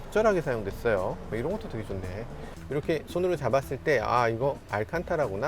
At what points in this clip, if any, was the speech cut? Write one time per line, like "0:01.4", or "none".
none